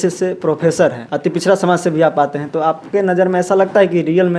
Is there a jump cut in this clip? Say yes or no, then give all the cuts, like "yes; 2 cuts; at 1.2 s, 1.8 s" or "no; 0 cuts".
yes; 1 cut; at 1.1 s